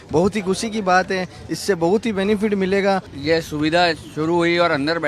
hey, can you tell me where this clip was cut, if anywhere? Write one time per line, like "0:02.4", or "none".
0:03.1